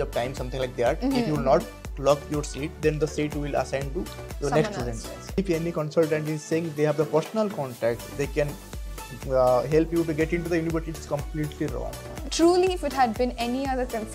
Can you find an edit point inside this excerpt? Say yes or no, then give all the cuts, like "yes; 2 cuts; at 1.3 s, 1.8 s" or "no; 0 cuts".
yes; 2 cuts; at 5.4 s, 12.1 s